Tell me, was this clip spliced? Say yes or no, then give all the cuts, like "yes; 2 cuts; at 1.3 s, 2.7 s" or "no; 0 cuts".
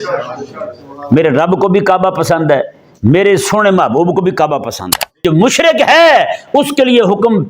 yes; 1 cut; at 5.2 s